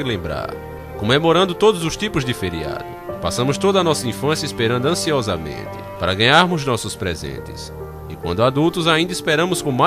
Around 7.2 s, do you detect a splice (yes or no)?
no